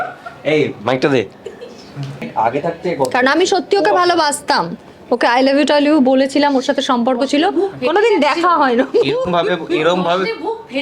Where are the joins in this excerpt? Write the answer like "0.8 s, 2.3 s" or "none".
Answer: 2.3 s

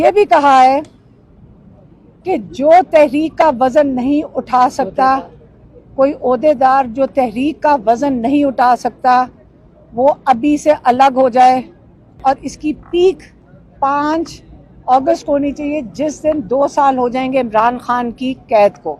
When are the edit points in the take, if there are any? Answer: 12.2 s

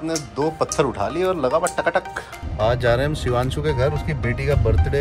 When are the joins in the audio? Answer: 2.4 s

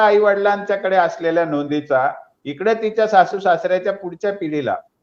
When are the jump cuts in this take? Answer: none

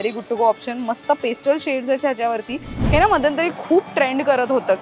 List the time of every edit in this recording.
2.8 s

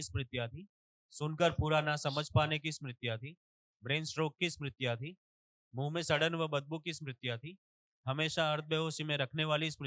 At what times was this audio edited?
none

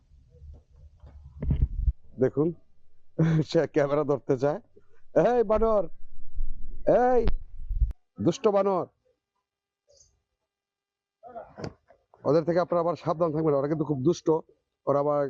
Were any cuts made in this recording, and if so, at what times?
none

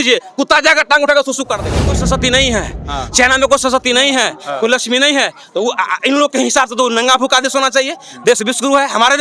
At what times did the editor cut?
2.0 s

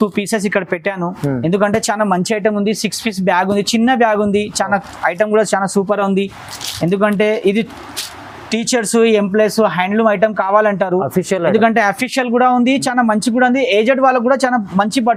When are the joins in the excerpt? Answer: none

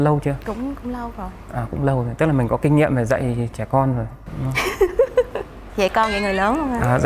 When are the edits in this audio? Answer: none

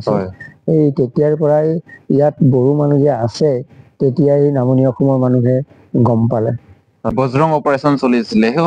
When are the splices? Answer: 7.1 s

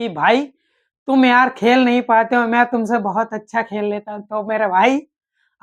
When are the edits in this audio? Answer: none

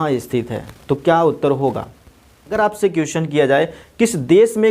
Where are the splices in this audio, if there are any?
2.6 s

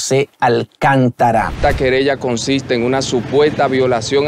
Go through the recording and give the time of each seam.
1.6 s

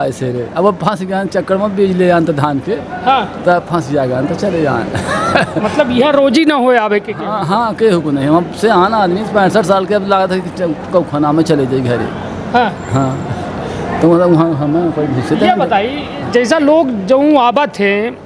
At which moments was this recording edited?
none

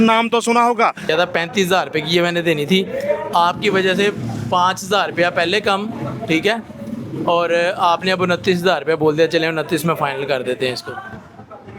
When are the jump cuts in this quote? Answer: 1.0 s

